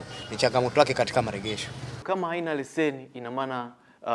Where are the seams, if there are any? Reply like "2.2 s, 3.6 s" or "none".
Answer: 2.0 s